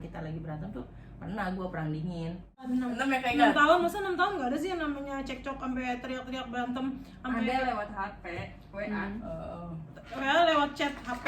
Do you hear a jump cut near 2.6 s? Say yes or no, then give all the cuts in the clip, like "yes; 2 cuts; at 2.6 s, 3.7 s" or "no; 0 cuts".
yes; 1 cut; at 2.6 s